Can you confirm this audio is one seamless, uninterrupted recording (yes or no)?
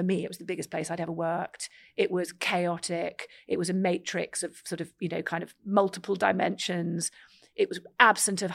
yes